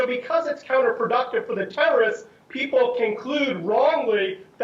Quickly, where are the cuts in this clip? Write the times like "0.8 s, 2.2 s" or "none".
1.0 s